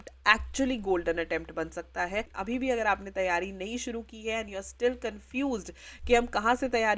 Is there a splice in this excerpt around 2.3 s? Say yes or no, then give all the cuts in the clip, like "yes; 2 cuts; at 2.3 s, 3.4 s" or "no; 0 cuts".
yes; 1 cut; at 2.3 s